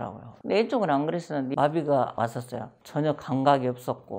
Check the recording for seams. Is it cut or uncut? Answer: cut